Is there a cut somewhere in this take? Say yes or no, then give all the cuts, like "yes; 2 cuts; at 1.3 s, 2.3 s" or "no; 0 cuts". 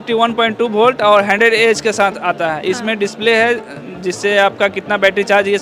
no; 0 cuts